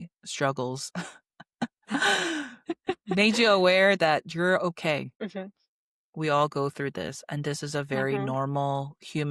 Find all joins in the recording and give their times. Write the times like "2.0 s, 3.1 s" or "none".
none